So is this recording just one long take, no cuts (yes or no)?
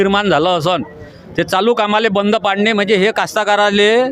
yes